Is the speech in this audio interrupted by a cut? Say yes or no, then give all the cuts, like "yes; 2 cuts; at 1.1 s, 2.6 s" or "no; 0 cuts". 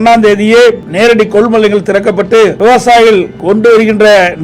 yes; 3 cuts; at 0.9 s, 2.5 s, 3.3 s